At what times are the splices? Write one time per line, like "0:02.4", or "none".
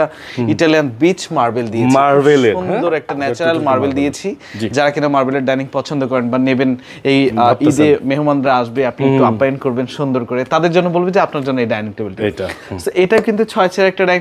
none